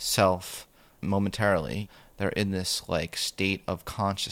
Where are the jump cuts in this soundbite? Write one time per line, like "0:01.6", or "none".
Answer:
0:01.0
0:01.9

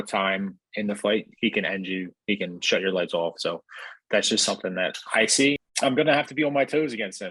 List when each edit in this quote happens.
0:05.6

